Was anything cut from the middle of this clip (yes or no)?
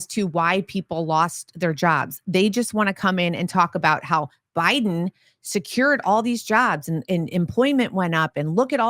no